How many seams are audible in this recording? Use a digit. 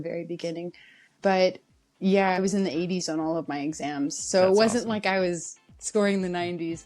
2